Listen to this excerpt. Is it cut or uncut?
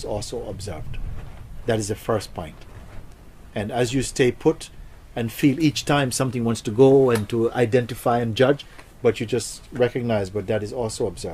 uncut